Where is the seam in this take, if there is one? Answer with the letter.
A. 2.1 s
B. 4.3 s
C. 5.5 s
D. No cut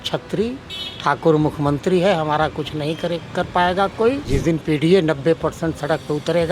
B